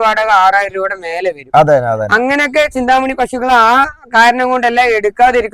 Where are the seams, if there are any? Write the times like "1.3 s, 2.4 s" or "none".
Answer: none